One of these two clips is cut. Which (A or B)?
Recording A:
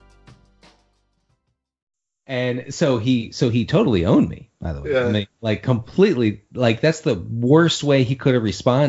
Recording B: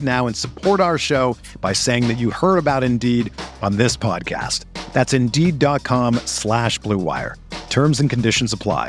A